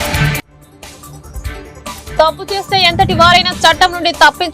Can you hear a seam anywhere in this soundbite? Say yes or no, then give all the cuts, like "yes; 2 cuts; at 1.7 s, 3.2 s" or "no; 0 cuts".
no; 0 cuts